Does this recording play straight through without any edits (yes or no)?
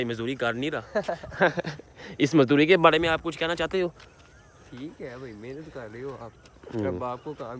yes